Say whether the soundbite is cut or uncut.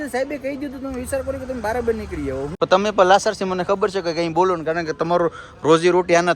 cut